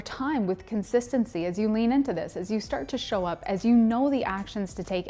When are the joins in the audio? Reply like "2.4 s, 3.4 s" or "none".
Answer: none